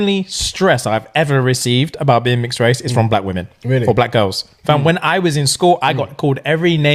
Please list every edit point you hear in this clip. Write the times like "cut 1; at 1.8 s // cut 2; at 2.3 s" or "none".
none